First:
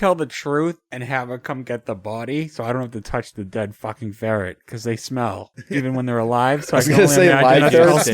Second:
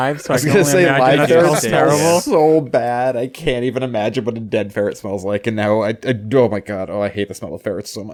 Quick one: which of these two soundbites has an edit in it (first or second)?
first